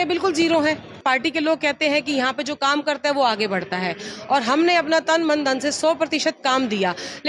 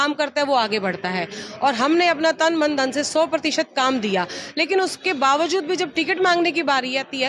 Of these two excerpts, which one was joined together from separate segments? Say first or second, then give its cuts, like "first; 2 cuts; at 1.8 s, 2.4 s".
first; 1 cut; at 1.0 s